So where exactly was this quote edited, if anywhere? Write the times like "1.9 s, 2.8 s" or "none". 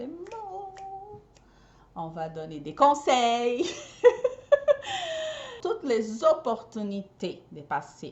5.6 s